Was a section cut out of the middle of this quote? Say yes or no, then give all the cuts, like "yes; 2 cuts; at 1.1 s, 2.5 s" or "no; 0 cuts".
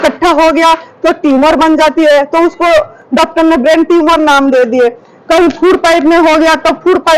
no; 0 cuts